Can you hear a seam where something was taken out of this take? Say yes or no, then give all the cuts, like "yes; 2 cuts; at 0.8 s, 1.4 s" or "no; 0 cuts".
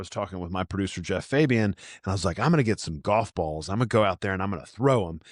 no; 0 cuts